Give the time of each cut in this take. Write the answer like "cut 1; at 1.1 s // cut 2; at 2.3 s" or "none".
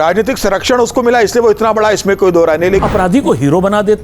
cut 1; at 2.8 s